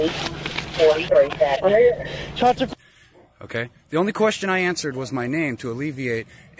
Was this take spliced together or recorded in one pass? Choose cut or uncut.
cut